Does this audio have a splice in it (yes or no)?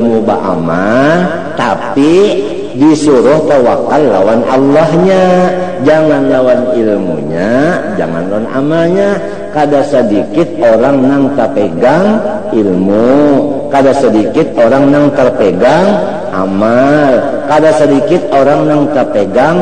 no